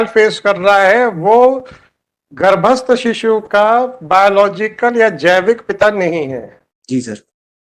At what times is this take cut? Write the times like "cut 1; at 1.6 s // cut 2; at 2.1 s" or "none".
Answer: none